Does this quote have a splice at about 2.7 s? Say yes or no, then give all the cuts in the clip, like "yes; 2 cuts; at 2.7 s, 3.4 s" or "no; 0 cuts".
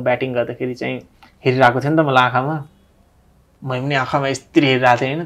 no; 0 cuts